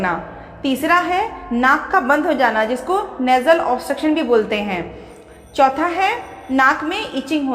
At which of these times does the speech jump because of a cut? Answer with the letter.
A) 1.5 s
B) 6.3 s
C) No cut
B